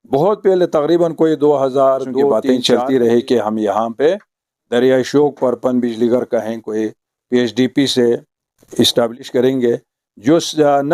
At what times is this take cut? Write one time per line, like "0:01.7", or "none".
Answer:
0:02.3

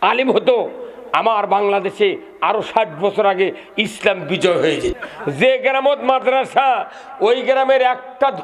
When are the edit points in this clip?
0:05.0

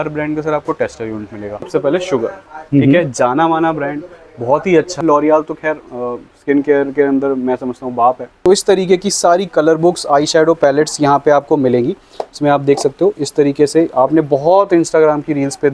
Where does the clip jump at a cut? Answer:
0:01.7
0:05.0
0:08.3

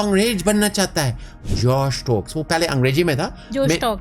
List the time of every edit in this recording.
0:01.4

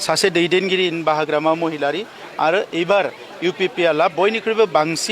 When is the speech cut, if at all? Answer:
0:02.2

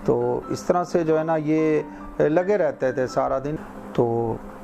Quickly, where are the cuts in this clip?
none

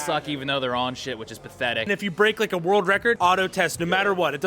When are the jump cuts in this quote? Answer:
0:01.8
0:03.2

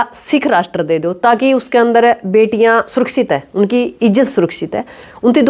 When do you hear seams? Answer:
none

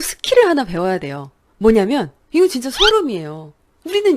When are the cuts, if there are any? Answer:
0:02.2

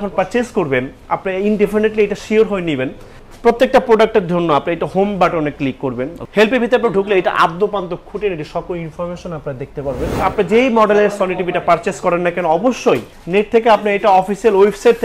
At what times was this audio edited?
0:06.2
0:10.2
0:13.1

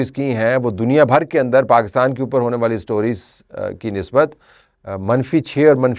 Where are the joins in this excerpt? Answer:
none

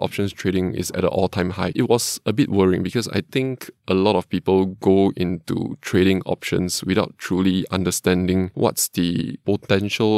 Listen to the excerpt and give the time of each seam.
0:01.7
0:09.4

